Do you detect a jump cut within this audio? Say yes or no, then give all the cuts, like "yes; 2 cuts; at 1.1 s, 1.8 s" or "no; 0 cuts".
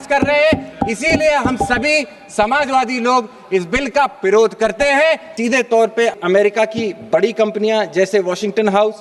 yes; 1 cut; at 5.3 s